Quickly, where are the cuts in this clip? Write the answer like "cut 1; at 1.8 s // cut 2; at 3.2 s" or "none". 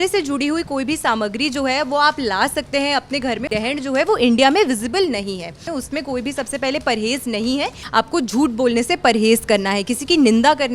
cut 1; at 3.5 s // cut 2; at 5.7 s // cut 3; at 7.8 s